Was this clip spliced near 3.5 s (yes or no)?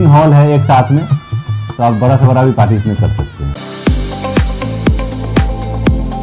yes